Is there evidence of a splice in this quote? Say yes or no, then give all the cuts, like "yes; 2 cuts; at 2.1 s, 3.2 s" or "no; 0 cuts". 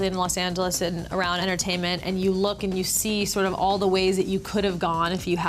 yes; 1 cut; at 1.4 s